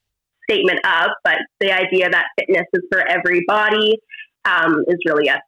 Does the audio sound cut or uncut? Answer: uncut